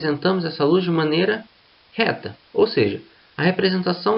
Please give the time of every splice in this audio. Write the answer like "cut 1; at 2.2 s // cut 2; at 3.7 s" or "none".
cut 1; at 1.1 s